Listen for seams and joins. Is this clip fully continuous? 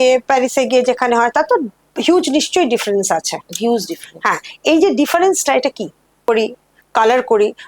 no; 1 cut; at 6.3 s

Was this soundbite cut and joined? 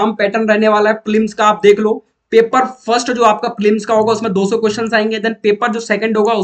no; 0 cuts

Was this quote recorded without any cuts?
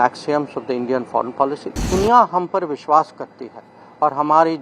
no; 1 cut; at 1.9 s

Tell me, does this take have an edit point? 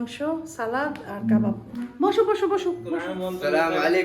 yes; 1 cut; at 3.1 s

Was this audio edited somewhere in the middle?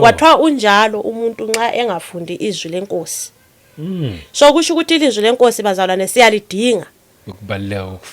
no; 0 cuts

